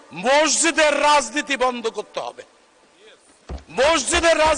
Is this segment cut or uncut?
uncut